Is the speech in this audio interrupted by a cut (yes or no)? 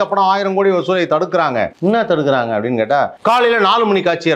yes